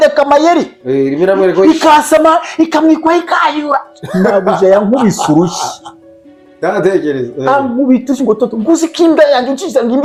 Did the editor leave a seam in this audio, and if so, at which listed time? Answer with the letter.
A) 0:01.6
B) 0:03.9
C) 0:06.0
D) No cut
D